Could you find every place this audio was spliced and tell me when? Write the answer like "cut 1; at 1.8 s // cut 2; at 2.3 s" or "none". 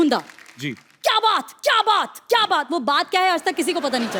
none